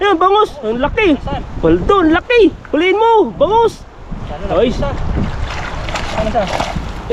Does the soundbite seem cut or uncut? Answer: uncut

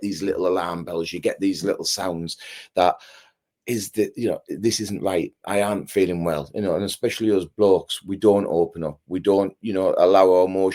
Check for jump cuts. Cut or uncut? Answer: uncut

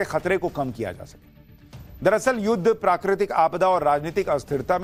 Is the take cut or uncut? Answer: uncut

